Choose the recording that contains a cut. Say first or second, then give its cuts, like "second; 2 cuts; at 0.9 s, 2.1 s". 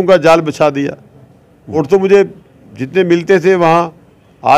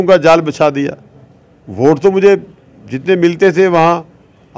first; 1 cut; at 1.8 s